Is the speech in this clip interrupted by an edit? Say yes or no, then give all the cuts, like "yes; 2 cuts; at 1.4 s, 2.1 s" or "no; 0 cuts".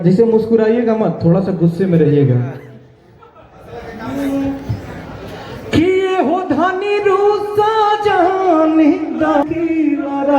yes; 1 cut; at 9.4 s